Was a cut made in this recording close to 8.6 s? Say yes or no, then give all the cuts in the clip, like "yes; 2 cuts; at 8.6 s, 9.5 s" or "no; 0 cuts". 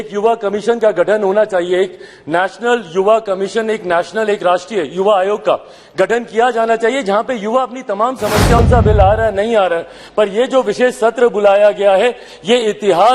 yes; 1 cut; at 8.6 s